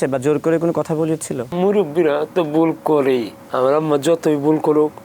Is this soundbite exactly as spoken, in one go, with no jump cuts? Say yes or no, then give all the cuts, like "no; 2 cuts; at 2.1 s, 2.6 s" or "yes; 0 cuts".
no; 2 cuts; at 1.5 s, 3.4 s